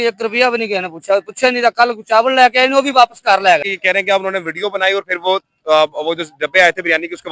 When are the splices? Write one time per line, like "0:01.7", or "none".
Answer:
0:03.6